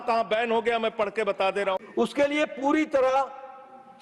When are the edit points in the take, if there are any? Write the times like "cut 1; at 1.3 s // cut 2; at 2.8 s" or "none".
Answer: cut 1; at 1.8 s